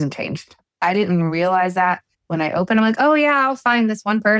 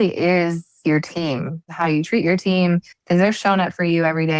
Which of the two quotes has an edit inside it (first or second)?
second